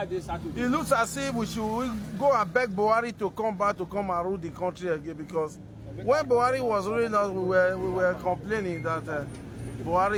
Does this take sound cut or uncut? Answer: uncut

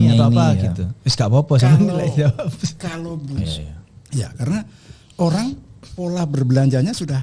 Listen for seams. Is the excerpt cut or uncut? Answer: cut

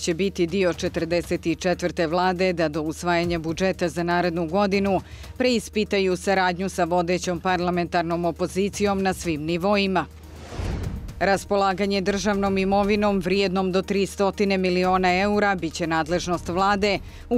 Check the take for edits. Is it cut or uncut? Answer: uncut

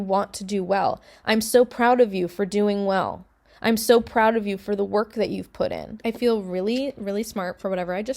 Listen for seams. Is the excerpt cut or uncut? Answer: cut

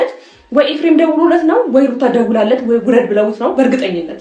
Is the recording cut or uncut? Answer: uncut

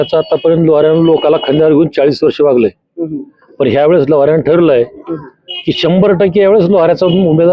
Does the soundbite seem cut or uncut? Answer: uncut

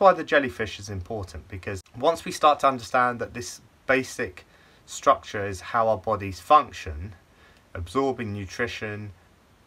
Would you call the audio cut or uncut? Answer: cut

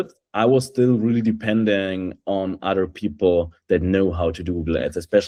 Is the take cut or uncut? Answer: uncut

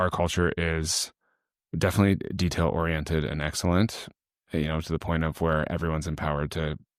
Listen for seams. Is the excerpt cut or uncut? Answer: uncut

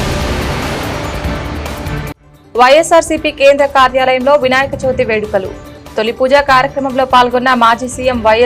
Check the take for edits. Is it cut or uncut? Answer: uncut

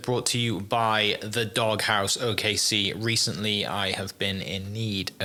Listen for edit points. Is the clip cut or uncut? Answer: uncut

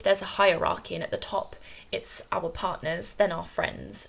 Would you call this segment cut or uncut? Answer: uncut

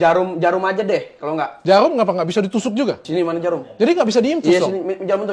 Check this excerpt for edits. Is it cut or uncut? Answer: cut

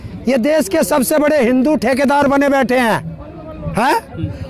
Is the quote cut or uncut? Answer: uncut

